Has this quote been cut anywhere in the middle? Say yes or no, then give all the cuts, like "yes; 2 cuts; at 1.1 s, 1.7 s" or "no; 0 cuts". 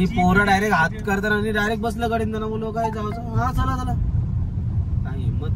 no; 0 cuts